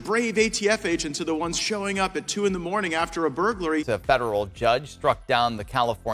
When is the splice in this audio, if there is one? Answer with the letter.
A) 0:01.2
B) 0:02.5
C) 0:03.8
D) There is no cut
C